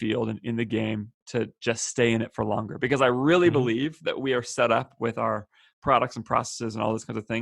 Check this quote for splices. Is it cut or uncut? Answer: cut